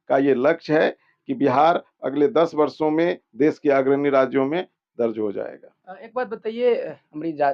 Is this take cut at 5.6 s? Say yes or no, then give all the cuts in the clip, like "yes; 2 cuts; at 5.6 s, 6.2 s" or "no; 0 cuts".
no; 0 cuts